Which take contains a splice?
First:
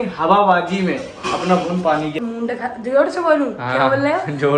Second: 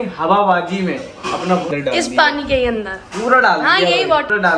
first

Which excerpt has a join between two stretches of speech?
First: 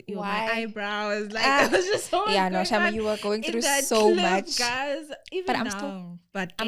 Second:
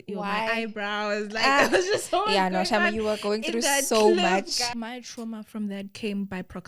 second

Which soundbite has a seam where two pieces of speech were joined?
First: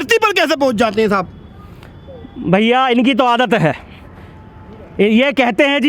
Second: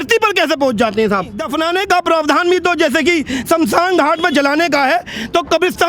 second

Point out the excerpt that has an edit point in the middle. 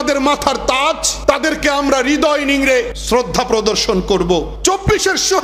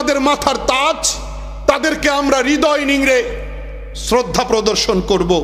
first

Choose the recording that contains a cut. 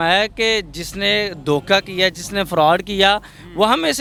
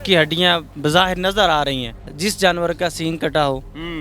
second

